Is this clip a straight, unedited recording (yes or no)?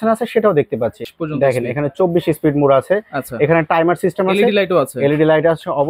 no